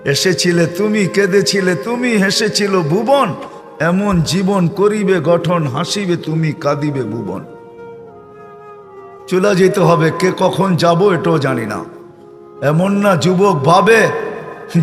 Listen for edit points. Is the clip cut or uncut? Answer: uncut